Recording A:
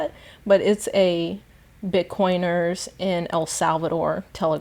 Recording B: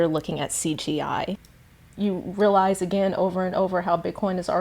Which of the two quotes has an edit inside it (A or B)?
B